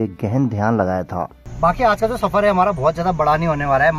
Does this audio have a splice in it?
yes; 1 cut; at 1.4 s

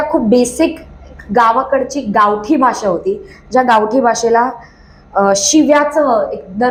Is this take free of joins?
yes; 0 cuts

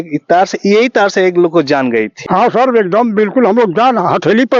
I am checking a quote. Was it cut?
yes; 1 cut; at 2.1 s

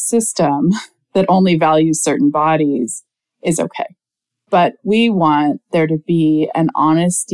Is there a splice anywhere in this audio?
yes; 1 cut; at 4.4 s

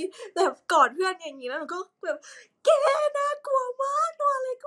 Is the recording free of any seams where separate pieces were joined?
yes; 0 cuts

